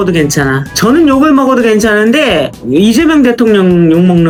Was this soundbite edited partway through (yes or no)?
no